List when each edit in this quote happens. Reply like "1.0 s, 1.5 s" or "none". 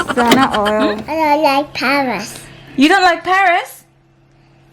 1.0 s